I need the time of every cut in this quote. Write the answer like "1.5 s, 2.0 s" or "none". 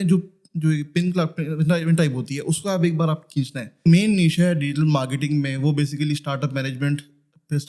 3.9 s